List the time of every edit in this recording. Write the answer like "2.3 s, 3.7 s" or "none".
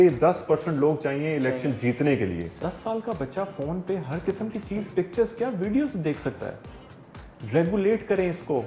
2.6 s